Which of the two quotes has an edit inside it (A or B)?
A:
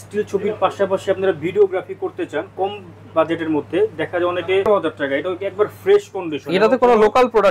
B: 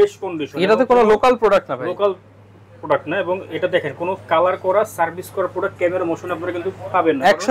A